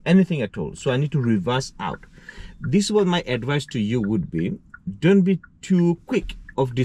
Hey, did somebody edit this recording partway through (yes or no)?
no